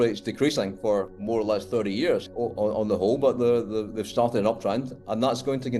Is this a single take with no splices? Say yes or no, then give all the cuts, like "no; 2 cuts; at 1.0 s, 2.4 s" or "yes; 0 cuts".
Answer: yes; 0 cuts